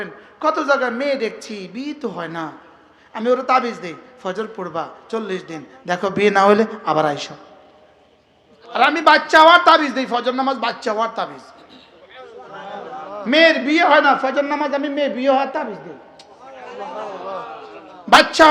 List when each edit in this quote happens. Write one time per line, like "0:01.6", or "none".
0:08.7